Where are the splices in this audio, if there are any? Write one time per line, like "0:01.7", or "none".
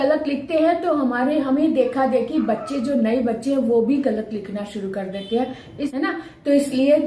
0:05.8